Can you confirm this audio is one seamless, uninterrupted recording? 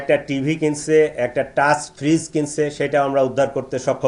yes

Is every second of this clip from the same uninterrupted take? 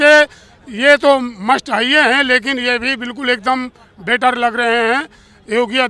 yes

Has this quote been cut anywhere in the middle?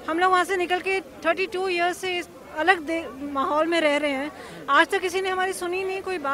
no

